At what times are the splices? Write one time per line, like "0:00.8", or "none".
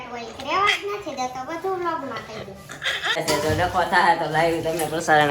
0:03.2